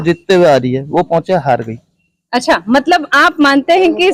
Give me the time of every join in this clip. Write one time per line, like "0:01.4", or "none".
none